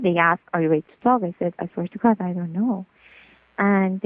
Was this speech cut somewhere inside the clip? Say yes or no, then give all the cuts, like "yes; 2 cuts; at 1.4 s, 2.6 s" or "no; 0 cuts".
no; 0 cuts